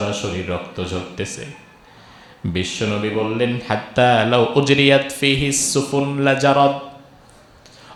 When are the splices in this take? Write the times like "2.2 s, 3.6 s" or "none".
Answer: none